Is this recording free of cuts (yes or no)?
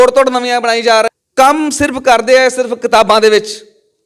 no